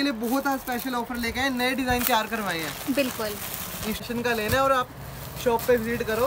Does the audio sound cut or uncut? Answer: cut